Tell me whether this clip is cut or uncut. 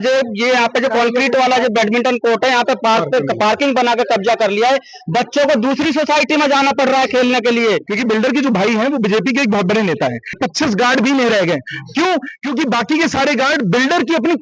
cut